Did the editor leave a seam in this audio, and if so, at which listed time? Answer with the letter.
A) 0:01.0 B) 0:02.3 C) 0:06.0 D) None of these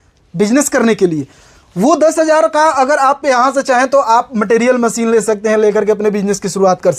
D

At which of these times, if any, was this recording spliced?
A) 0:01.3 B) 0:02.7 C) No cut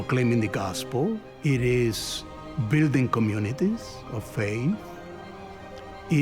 A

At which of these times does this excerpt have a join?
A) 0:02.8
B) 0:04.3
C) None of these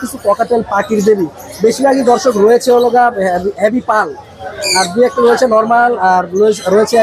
C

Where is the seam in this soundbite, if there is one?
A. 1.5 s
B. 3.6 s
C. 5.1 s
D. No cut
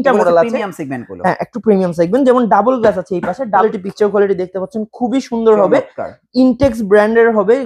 B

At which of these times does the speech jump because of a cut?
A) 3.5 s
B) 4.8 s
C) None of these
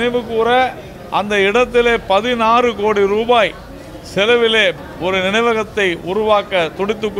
B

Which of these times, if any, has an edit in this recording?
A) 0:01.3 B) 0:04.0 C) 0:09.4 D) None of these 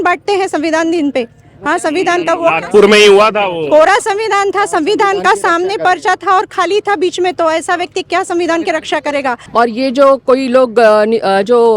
C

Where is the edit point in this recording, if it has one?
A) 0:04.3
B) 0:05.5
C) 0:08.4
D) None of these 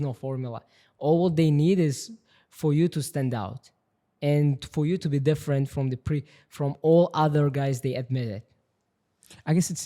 D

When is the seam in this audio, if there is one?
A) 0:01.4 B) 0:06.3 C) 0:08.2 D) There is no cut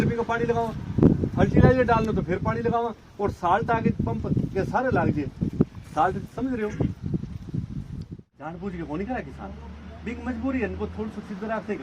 C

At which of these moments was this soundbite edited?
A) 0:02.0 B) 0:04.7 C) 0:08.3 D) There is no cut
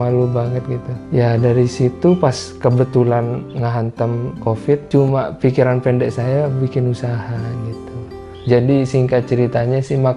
C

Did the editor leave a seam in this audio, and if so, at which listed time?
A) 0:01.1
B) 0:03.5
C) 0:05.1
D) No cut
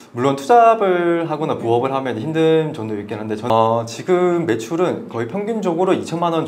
B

